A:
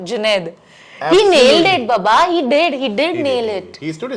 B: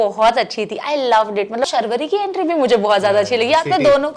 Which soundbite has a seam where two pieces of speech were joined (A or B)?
B